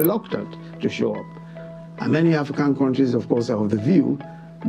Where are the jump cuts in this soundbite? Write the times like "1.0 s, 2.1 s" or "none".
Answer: 1.5 s